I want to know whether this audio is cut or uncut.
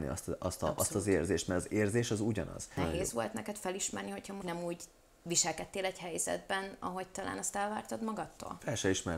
cut